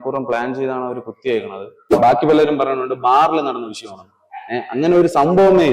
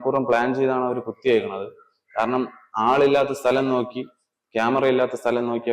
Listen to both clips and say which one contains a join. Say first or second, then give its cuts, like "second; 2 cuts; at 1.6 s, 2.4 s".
first; 1 cut; at 1.9 s